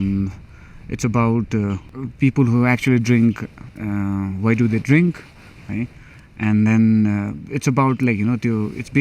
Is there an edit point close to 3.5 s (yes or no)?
no